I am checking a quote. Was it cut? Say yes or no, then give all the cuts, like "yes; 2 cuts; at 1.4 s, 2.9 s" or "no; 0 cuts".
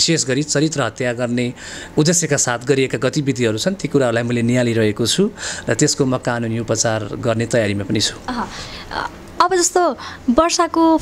no; 0 cuts